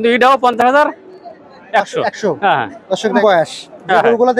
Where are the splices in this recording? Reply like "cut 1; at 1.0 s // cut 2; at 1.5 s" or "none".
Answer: cut 1; at 3.2 s